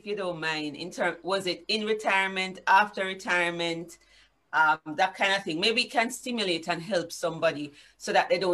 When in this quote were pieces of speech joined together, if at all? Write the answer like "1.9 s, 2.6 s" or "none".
none